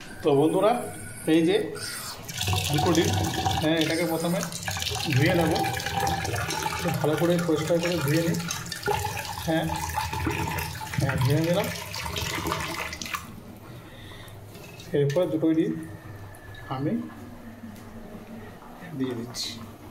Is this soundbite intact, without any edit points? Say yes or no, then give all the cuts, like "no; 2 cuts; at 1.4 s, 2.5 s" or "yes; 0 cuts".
yes; 0 cuts